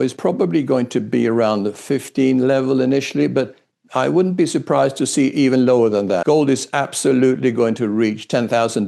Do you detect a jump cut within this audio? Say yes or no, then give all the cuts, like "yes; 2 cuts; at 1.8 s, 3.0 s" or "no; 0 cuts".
yes; 1 cut; at 6.2 s